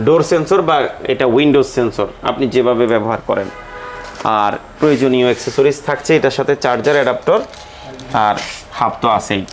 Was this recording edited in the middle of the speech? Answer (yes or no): no